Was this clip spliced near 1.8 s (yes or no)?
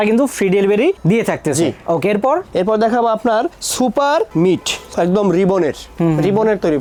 no